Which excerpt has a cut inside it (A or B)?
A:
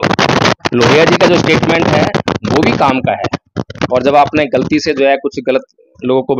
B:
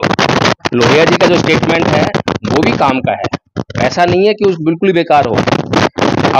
A